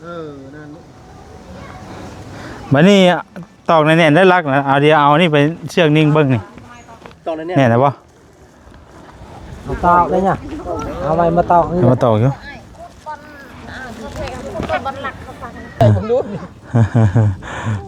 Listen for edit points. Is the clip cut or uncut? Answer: cut